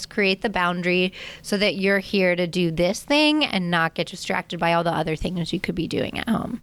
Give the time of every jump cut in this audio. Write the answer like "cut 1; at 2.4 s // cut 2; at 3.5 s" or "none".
none